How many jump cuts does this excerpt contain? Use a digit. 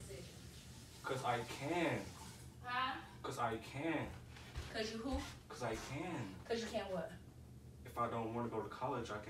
0